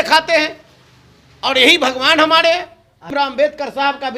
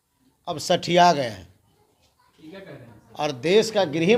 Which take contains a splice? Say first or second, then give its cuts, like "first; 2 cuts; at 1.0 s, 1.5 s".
first; 1 cut; at 3.2 s